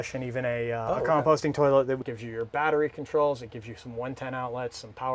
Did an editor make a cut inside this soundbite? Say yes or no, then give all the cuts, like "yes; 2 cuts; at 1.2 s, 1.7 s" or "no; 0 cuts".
yes; 1 cut; at 2.0 s